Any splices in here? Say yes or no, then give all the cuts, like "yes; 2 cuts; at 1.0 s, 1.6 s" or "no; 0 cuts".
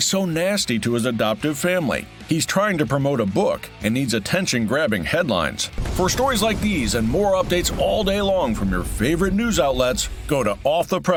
no; 0 cuts